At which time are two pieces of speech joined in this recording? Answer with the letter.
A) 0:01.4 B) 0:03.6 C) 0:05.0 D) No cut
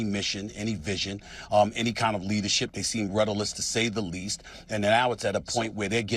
D